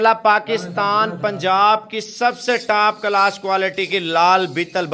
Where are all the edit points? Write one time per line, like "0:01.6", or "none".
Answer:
none